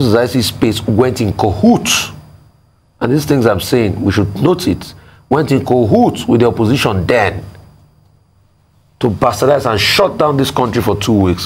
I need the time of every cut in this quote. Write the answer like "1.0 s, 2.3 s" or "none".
none

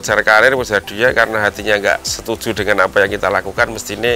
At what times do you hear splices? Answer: 2.1 s

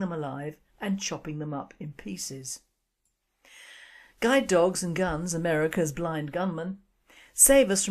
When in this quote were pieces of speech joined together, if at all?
6.3 s

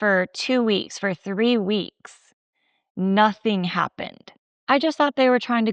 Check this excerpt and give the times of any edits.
4.5 s

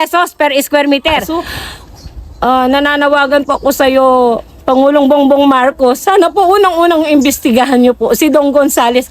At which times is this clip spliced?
1.3 s

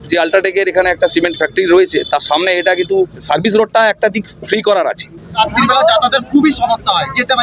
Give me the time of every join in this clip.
5.4 s

